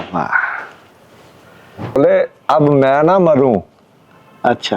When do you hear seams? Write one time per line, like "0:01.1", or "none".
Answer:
0:02.0